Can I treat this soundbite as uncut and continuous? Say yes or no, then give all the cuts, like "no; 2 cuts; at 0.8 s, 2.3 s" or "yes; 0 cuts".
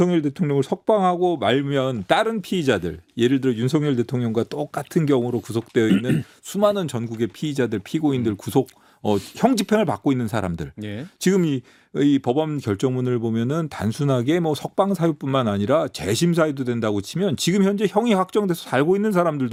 yes; 0 cuts